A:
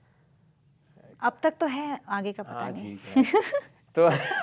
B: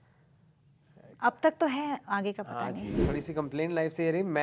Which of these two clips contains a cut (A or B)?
B